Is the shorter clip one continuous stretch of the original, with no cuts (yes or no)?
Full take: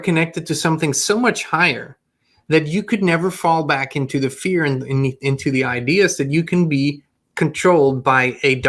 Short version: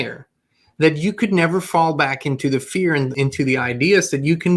no